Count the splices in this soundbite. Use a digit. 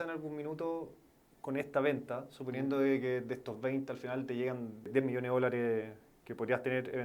1